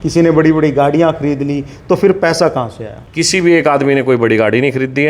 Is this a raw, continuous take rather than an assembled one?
yes; 0 cuts

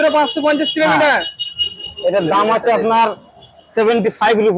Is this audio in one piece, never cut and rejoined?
yes; 0 cuts

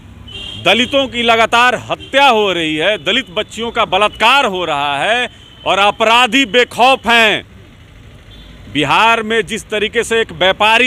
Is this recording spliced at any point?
no; 0 cuts

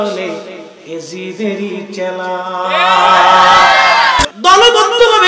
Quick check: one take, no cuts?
no; 1 cut; at 4.2 s

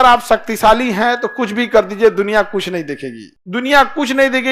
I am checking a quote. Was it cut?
no; 0 cuts

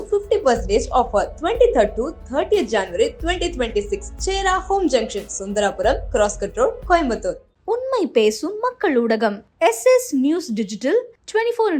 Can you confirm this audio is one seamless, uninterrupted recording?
yes; 0 cuts

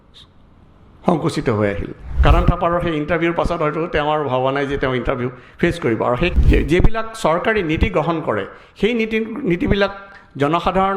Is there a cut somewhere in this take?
yes; 2 cuts; at 2.0 s, 6.3 s

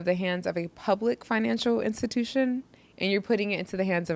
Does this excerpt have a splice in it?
no; 0 cuts

